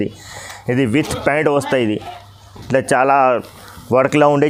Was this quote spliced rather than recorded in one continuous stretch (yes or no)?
no